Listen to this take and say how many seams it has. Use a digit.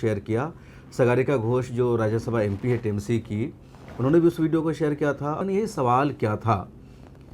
1